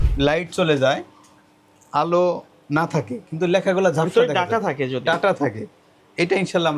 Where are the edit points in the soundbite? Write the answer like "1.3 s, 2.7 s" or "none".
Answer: none